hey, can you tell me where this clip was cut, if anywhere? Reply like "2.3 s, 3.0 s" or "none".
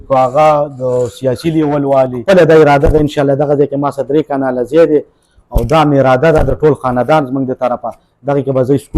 2.2 s